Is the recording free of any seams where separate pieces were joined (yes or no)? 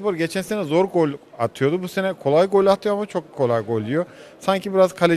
yes